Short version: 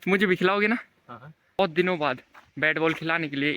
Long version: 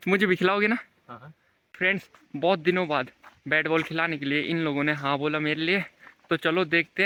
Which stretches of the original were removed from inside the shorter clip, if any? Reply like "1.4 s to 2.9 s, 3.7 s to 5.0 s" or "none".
1.6 s to 2.5 s